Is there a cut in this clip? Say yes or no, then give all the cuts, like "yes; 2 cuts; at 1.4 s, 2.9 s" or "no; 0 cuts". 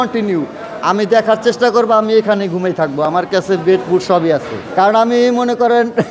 yes; 1 cut; at 4.6 s